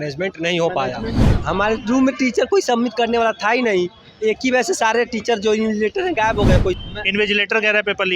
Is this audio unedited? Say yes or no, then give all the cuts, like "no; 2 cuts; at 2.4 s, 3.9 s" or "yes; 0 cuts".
no; 2 cuts; at 1.2 s, 6.8 s